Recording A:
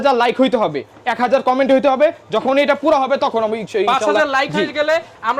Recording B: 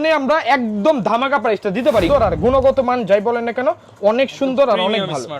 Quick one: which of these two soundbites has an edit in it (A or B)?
B